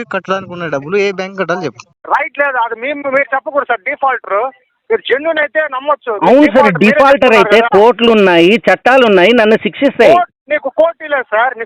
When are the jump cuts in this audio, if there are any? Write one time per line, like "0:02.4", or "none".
0:01.9